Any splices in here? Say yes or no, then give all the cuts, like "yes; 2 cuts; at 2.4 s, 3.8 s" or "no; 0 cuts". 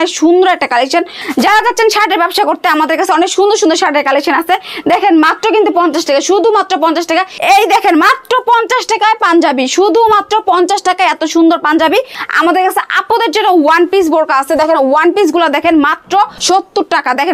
yes; 4 cuts; at 1.2 s, 7.3 s, 12.2 s, 16.4 s